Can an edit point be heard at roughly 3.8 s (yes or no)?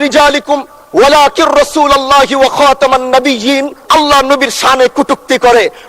yes